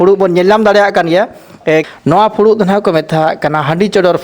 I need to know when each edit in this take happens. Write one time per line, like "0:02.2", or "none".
0:01.9